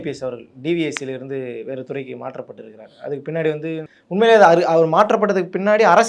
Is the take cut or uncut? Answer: cut